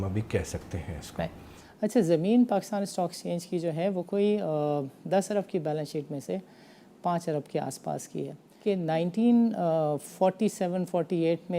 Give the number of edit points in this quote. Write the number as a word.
two